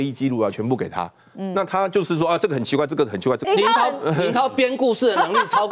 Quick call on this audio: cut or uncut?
cut